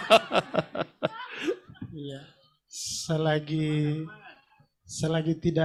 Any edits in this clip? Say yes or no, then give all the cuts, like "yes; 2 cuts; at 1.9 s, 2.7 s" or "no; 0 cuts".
no; 0 cuts